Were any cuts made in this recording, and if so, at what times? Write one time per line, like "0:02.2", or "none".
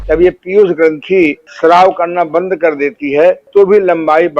0:01.5
0:03.4